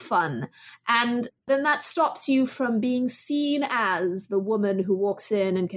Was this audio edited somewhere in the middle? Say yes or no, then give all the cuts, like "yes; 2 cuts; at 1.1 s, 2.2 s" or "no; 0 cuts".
no; 0 cuts